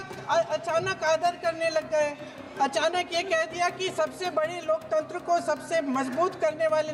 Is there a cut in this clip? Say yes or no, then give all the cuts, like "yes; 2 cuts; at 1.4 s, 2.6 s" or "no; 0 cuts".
no; 0 cuts